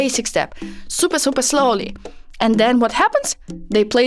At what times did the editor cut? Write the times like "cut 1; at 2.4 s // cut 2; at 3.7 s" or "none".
none